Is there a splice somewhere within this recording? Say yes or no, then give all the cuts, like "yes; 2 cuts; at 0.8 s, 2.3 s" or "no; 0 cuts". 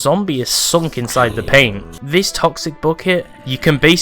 yes; 1 cut; at 1.8 s